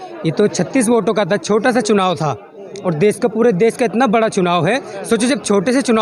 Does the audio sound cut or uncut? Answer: uncut